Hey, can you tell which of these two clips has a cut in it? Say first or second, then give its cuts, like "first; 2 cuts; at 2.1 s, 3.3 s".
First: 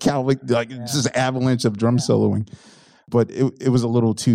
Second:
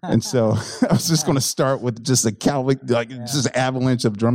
first; 1 cut; at 3.0 s